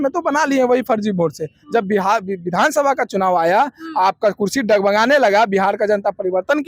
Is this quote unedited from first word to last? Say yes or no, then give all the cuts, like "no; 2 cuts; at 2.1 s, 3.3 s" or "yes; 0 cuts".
yes; 0 cuts